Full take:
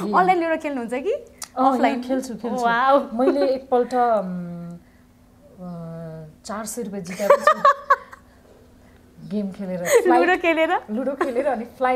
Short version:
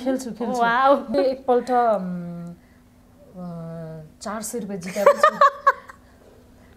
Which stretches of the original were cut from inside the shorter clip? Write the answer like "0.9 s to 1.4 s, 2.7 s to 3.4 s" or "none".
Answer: 3.2 s to 3.4 s